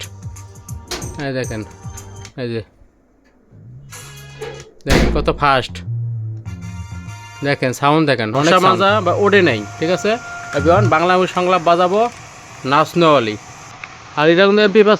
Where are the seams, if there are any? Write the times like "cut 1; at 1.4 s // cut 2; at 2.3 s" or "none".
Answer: cut 1; at 8.5 s

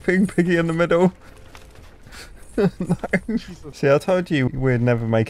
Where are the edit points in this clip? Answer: cut 1; at 3.6 s

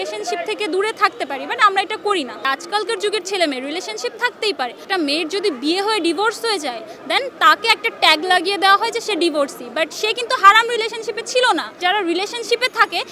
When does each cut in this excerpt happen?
cut 1; at 2.4 s // cut 2; at 4.8 s // cut 3; at 11.8 s

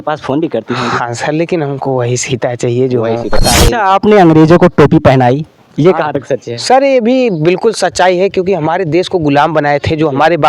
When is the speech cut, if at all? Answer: cut 1; at 3.4 s

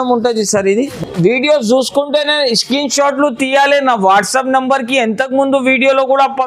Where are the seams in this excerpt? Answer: cut 1; at 1.0 s

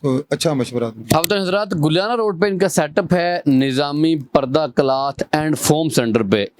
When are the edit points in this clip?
cut 1; at 1.1 s

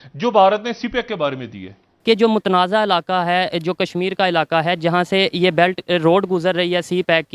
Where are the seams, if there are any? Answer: cut 1; at 1.9 s

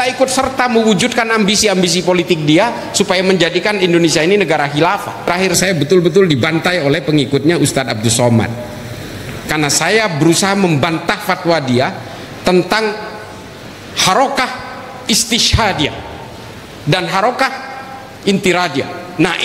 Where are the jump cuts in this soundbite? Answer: cut 1; at 5.3 s

